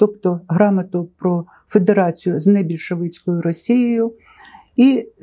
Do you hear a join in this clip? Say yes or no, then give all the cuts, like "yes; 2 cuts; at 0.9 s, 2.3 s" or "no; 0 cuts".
no; 0 cuts